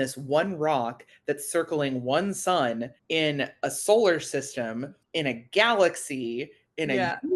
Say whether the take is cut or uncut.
uncut